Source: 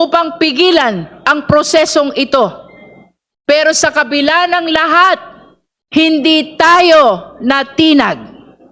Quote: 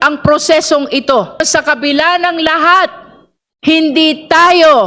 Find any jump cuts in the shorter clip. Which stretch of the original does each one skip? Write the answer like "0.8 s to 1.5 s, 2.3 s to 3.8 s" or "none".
2.6 s to 3.7 s